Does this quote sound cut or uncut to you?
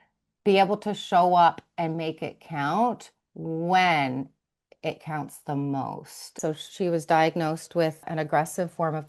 cut